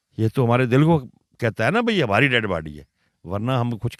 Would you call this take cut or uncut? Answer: uncut